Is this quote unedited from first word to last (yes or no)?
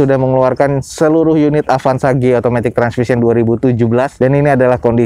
yes